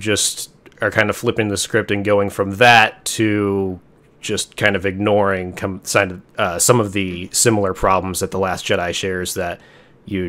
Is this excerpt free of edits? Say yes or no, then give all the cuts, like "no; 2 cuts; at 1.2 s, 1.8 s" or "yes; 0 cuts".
yes; 0 cuts